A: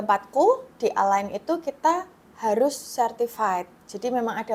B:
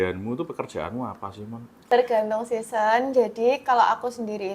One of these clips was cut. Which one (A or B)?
B